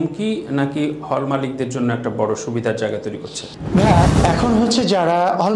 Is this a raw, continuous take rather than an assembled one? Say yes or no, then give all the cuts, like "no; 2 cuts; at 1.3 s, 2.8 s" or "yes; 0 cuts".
yes; 0 cuts